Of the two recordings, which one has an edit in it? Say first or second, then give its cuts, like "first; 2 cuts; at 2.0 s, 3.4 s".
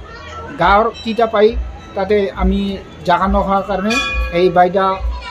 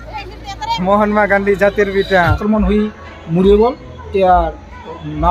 second; 1 cut; at 2.4 s